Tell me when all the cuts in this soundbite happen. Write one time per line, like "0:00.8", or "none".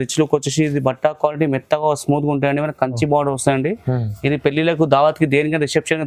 none